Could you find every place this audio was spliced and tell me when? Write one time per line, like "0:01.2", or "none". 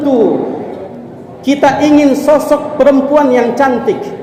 none